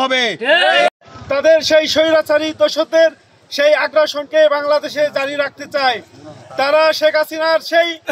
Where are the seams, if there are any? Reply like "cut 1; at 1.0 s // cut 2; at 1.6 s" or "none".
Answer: none